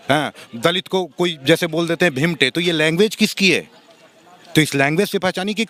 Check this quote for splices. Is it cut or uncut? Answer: uncut